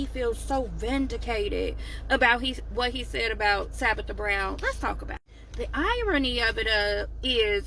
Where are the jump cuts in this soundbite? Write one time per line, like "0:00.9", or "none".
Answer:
none